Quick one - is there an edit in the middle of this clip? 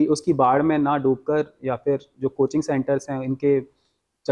no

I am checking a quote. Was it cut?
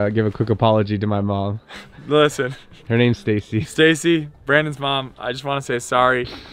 no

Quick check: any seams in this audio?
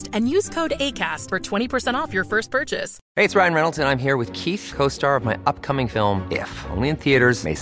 yes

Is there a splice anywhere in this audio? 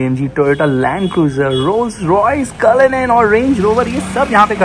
no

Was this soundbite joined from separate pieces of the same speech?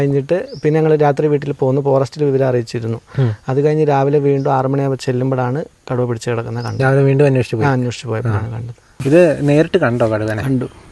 yes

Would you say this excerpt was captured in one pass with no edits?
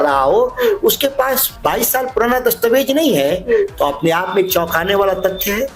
yes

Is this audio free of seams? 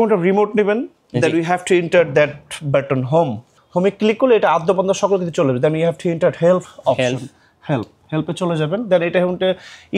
no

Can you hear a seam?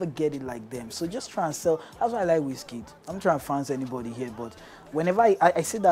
no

